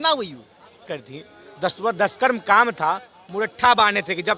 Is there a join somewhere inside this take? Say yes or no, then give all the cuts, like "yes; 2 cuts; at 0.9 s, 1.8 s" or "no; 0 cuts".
yes; 1 cut; at 0.9 s